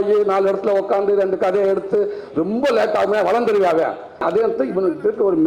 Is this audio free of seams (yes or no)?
no